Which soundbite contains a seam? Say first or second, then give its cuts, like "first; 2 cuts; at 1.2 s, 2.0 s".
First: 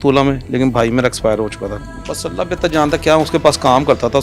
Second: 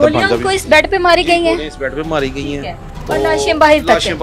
first; 1 cut; at 1.8 s